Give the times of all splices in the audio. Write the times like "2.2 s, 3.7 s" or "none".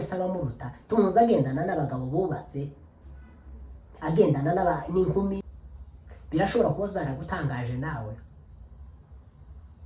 5.5 s